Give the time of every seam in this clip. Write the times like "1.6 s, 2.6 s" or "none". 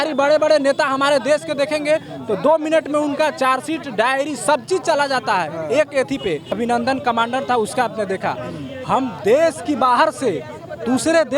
6.5 s